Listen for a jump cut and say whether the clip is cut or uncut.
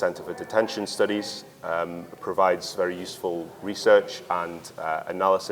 uncut